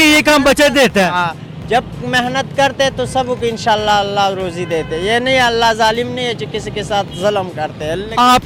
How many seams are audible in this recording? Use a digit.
0